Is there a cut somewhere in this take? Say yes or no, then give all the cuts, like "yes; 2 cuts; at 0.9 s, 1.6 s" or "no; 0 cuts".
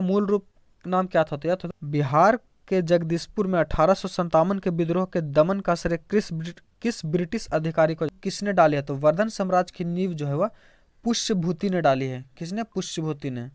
yes; 2 cuts; at 1.3 s, 8.2 s